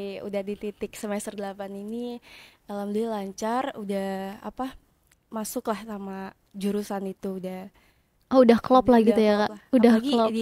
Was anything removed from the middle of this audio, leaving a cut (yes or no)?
no